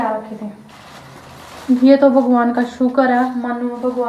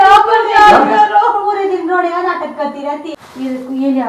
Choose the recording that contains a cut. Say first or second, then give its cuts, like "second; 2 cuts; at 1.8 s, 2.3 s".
second; 1 cut; at 3.1 s